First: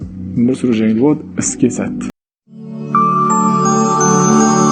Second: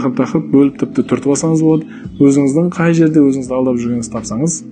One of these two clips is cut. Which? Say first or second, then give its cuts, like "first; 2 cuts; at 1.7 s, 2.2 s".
first; 1 cut; at 2.3 s